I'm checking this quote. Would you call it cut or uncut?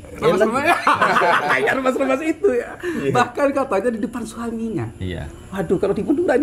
uncut